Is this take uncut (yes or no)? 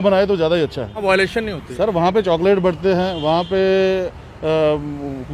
no